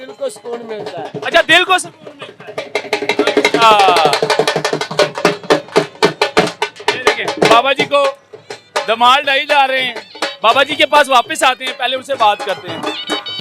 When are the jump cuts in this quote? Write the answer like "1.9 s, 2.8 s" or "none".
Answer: none